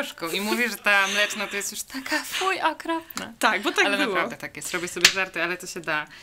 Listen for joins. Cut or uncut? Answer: uncut